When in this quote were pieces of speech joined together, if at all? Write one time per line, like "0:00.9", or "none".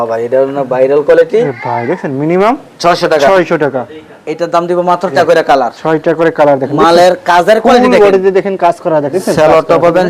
0:01.5
0:05.1
0:09.1